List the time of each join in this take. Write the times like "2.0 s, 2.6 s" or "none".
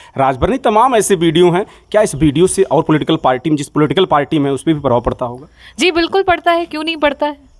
none